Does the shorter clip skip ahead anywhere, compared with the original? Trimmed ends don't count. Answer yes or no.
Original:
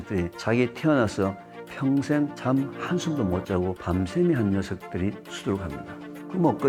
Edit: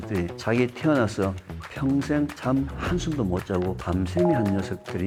no